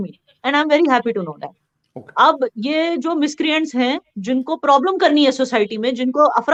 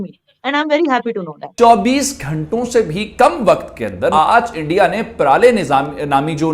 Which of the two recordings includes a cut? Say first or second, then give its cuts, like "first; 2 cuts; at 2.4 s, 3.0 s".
second; 2 cuts; at 1.5 s, 4.1 s